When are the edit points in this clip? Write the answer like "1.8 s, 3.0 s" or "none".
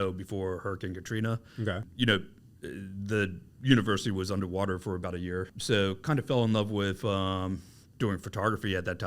1.8 s, 5.5 s